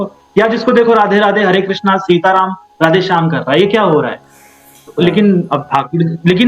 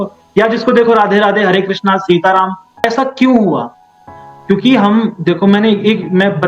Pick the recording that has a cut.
second; 1 cut; at 2.8 s

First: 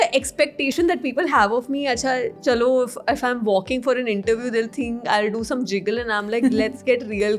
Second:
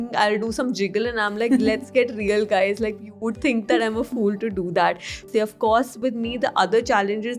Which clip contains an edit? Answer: second; 1 cut; at 5.2 s

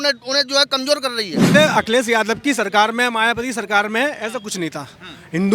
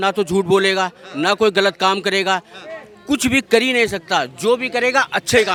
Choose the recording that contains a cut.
first; 1 cut; at 1.5 s

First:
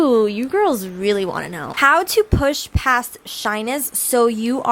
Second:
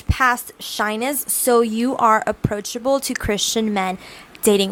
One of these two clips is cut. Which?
first; 1 cut; at 1.7 s

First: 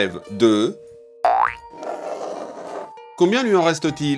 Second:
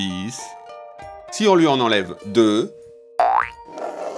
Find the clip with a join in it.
second; 1 cut; at 0.9 s

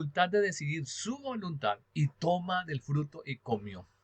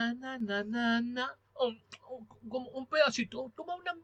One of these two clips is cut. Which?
first; 1 cut; at 1.8 s

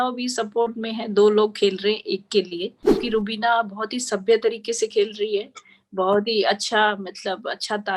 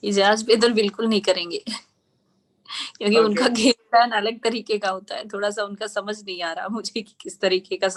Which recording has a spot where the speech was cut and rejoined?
first; 1 cut; at 3.0 s

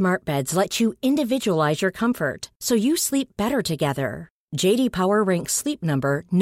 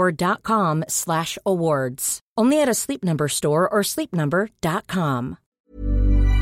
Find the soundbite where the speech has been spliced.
second; 1 cut; at 5.5 s

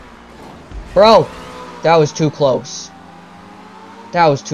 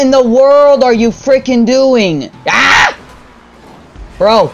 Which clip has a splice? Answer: second; 1 cut; at 2.3 s

